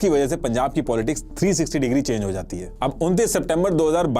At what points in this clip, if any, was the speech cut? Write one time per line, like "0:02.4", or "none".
0:02.6